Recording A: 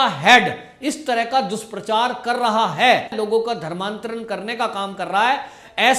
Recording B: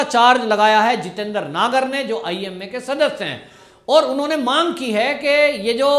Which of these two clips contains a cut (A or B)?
A